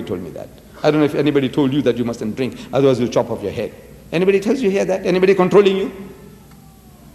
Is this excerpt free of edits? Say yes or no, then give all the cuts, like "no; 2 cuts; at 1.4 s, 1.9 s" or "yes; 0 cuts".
yes; 0 cuts